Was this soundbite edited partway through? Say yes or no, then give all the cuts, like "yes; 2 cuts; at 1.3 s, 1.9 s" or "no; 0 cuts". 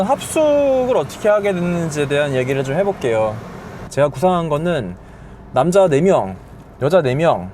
yes; 1 cut; at 3.9 s